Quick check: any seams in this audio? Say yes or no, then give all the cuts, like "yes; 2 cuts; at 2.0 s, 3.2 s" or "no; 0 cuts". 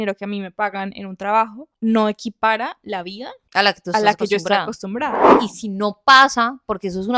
yes; 1 cut; at 5.3 s